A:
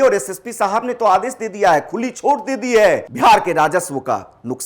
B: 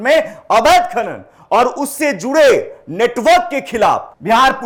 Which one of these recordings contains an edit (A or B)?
A